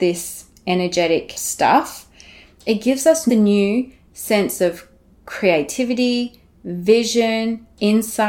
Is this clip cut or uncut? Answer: cut